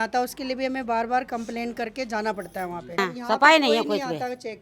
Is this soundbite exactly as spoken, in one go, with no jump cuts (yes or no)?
no